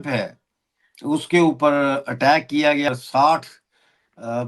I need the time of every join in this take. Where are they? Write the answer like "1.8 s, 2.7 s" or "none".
2.9 s